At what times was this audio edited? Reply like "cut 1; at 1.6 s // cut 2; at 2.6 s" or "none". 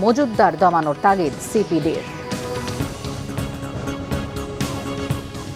cut 1; at 3.5 s // cut 2; at 4.7 s